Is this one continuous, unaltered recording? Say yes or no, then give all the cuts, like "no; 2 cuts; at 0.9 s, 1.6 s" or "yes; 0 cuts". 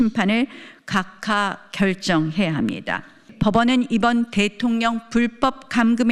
no; 1 cut; at 3.3 s